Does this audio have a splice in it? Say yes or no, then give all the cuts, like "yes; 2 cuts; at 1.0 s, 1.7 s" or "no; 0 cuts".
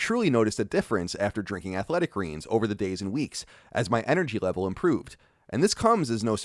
no; 0 cuts